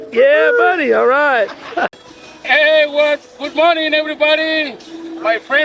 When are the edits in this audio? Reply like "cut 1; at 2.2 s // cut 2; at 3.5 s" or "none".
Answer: cut 1; at 1.9 s

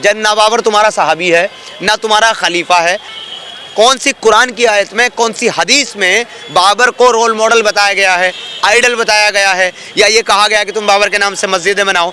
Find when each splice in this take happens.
cut 1; at 3.1 s

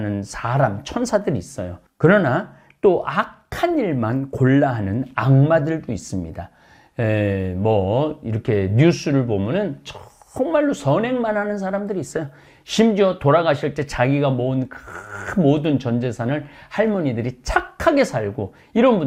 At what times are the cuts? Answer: none

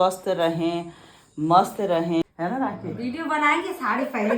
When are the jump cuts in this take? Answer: cut 1; at 2.2 s

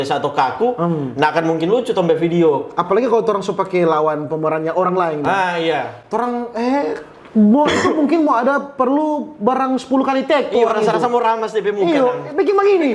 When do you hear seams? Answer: none

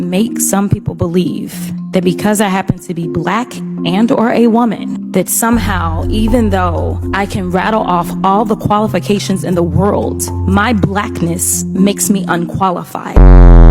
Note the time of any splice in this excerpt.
none

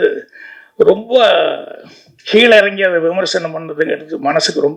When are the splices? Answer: none

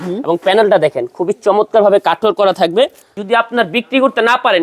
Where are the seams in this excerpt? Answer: cut 1; at 3.2 s

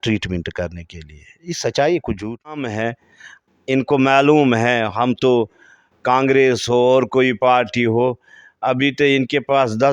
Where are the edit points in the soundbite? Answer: cut 1; at 2.7 s

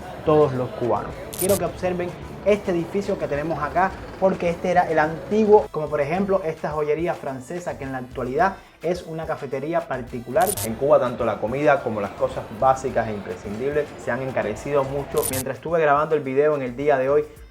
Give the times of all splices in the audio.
cut 1; at 1.4 s // cut 2; at 5.7 s // cut 3; at 10.6 s // cut 4; at 15.3 s

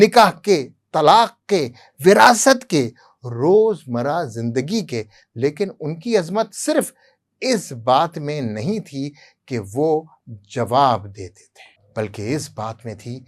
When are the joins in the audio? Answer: none

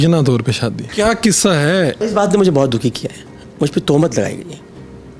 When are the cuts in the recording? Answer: cut 1; at 0.8 s // cut 2; at 2.0 s

